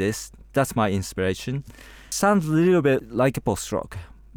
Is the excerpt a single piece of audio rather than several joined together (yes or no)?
no